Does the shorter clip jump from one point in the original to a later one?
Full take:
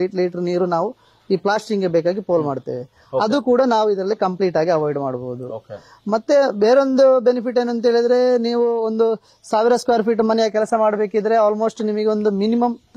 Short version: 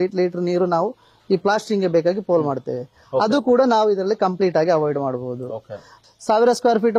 yes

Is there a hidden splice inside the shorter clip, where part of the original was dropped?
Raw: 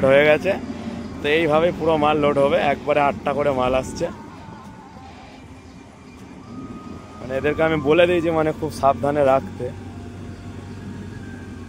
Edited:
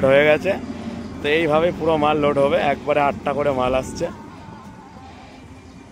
no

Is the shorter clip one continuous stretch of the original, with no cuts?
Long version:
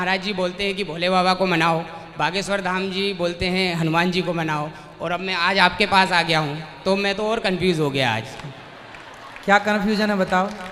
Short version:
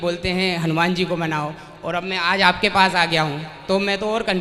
yes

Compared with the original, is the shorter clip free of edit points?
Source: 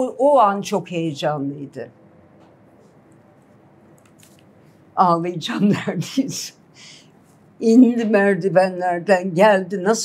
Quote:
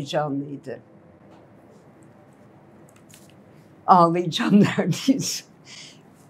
yes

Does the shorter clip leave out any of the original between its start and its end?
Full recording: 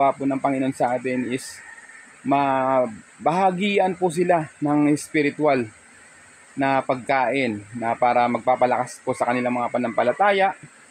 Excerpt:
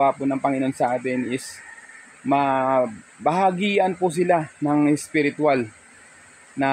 no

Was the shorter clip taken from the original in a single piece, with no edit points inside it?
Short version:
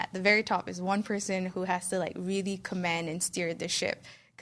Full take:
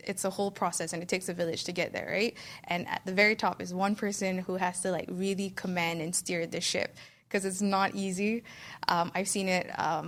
yes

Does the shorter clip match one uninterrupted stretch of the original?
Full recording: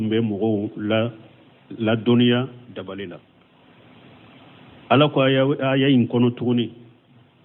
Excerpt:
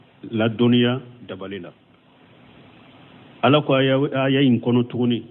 yes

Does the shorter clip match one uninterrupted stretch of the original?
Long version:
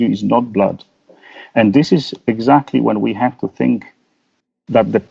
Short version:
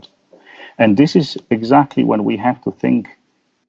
yes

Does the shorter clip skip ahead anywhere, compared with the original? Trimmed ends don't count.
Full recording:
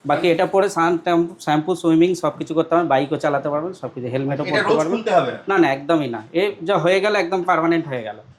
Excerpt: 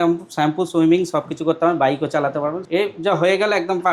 yes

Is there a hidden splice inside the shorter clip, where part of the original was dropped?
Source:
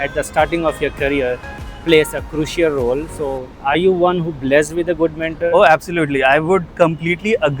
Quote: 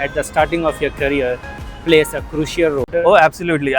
yes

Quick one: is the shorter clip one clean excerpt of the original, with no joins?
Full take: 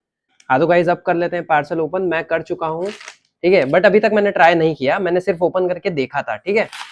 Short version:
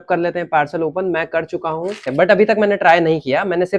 no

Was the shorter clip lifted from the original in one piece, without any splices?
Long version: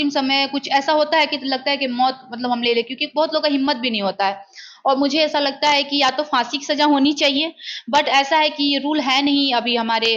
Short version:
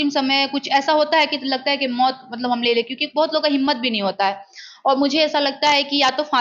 yes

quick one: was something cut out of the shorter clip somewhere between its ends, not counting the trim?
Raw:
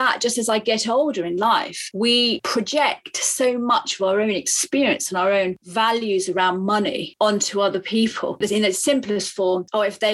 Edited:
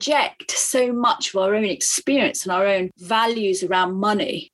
no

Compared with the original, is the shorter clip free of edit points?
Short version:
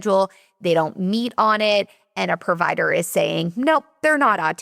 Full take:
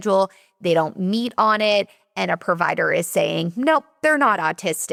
yes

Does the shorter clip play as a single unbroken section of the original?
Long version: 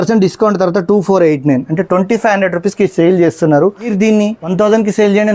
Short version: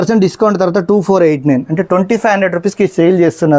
yes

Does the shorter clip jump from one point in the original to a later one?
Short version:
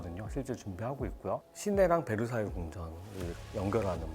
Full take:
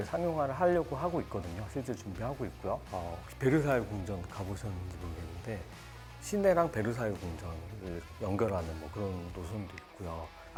yes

